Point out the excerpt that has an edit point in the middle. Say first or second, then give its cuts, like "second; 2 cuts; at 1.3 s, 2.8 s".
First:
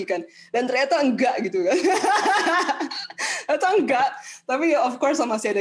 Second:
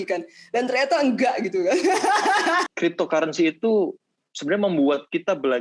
second; 1 cut; at 2.7 s